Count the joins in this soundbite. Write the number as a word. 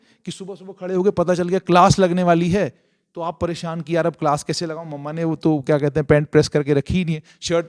zero